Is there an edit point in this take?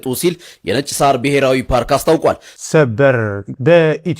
yes; 1 cut; at 2.5 s

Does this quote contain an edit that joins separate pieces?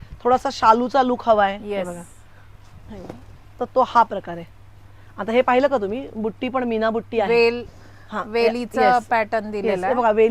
no; 0 cuts

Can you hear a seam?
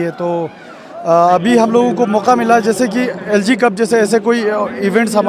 no; 0 cuts

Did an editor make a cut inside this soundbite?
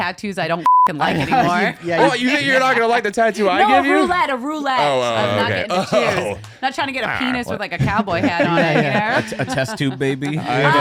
no; 0 cuts

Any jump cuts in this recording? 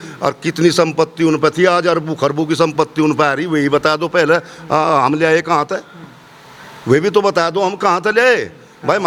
no; 0 cuts

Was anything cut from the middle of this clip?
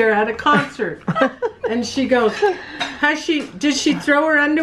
no; 0 cuts

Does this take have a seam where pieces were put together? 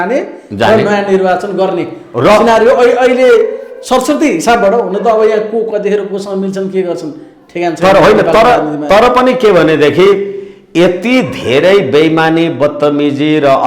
no; 0 cuts

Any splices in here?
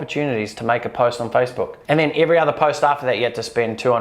yes; 1 cut; at 1.8 s

